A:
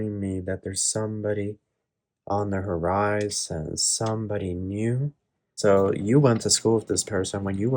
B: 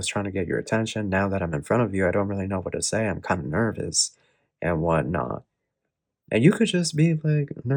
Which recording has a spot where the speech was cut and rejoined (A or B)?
A